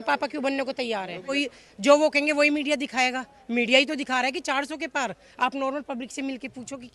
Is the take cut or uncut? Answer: cut